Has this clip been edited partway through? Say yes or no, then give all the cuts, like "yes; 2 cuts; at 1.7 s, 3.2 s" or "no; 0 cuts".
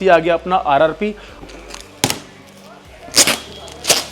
yes; 1 cut; at 1.3 s